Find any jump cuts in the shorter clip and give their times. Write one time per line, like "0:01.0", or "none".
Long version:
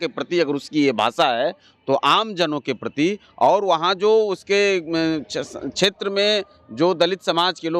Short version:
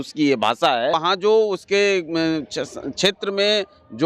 0:01.0